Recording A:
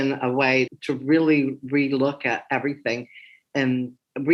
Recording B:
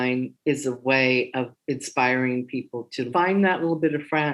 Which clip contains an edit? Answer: B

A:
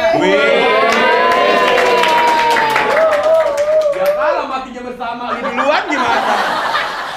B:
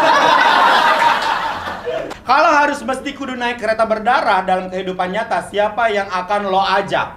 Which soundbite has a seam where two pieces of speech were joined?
B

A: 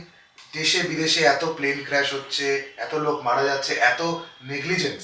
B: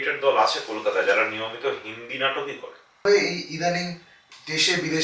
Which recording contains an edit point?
B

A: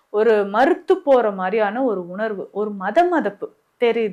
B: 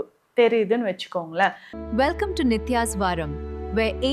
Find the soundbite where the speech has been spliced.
B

